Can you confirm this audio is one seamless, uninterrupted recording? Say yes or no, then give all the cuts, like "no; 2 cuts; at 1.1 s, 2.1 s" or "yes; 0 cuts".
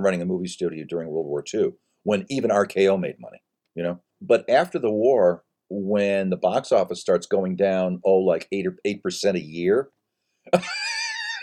no; 1 cut; at 4.1 s